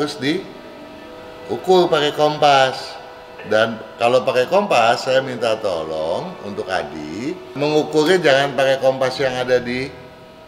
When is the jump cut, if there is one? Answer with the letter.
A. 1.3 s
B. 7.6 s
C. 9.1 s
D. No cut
B